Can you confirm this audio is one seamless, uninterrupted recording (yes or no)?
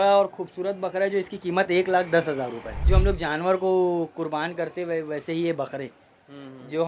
no